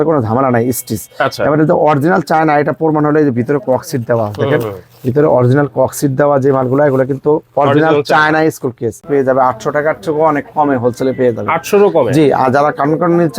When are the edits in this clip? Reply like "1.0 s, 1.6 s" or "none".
9.0 s